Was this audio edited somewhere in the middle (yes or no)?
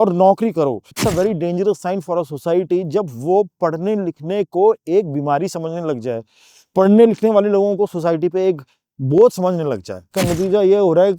yes